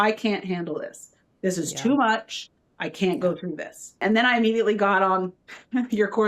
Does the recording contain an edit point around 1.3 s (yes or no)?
no